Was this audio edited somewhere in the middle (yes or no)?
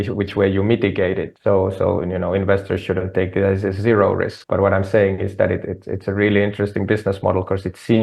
yes